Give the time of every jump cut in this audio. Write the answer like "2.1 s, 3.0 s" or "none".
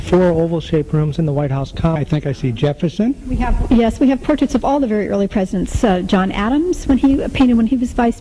none